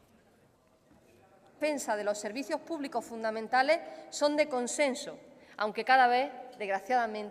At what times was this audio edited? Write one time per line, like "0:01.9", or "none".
none

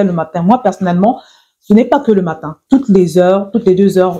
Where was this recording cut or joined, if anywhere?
0:02.5

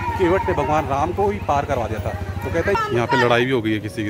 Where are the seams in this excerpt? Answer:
0:02.8

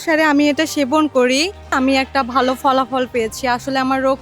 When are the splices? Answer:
0:01.8

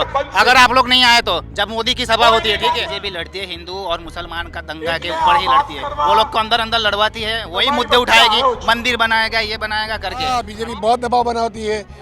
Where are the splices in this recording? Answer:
0:02.9
0:10.2

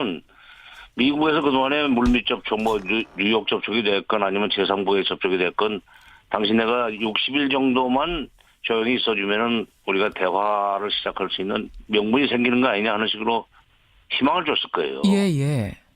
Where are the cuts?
0:05.5

